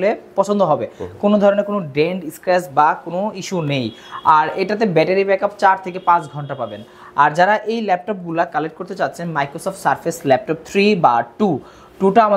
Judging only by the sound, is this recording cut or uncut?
uncut